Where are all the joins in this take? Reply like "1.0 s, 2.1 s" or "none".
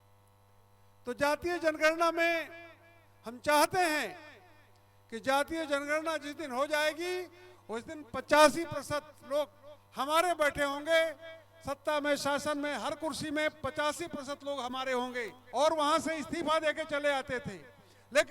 15.4 s